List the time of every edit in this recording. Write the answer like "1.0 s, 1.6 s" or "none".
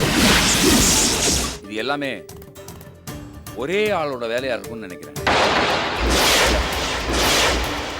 1.6 s